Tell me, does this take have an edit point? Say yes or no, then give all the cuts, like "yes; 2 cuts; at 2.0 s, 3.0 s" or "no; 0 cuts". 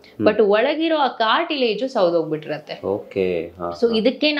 no; 0 cuts